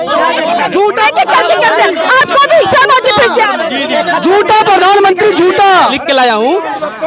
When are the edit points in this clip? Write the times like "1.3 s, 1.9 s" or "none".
6.0 s